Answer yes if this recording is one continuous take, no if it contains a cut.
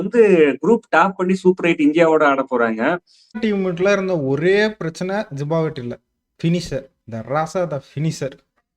no